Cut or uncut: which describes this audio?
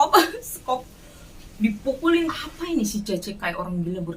cut